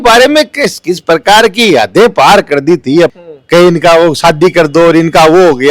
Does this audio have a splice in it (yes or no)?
yes